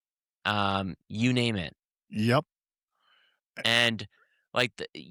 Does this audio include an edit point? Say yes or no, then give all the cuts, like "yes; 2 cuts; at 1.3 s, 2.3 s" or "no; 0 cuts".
no; 0 cuts